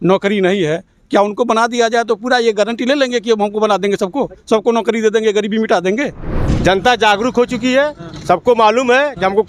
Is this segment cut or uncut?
cut